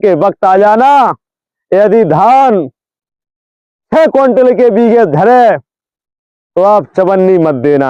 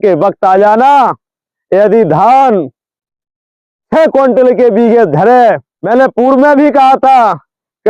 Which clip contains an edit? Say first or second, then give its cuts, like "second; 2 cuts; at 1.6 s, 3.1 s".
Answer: second; 1 cut; at 5.7 s